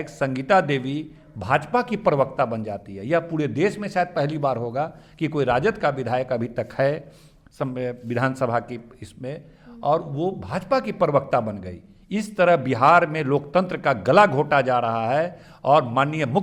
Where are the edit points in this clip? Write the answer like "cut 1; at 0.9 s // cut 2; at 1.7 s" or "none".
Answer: none